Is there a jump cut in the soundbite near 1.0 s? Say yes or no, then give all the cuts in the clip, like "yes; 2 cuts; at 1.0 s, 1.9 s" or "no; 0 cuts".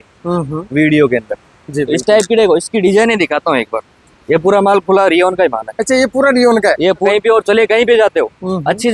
no; 1 cut; at 7.0 s